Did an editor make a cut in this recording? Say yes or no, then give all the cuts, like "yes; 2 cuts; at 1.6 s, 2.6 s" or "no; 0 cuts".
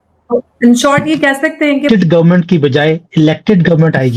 yes; 1 cut; at 1.9 s